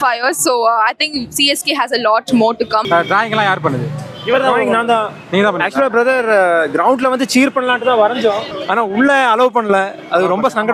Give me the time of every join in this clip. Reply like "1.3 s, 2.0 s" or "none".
2.8 s, 8.5 s